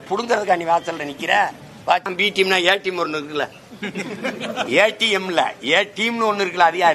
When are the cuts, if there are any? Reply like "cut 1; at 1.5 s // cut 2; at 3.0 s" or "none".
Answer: cut 1; at 2.1 s